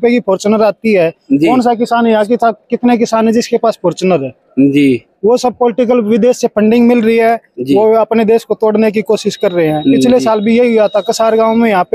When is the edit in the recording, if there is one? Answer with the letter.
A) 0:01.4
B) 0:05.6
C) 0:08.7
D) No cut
D